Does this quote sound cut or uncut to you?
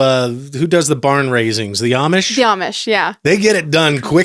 cut